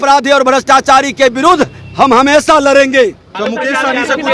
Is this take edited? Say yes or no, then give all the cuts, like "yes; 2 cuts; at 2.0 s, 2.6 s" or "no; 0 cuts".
yes; 1 cut; at 3.3 s